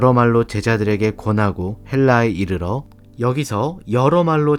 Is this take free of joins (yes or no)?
yes